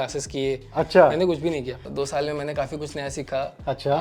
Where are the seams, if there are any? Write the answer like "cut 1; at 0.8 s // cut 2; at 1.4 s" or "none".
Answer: cut 1; at 1.9 s